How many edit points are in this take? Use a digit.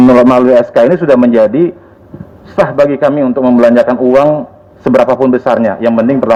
0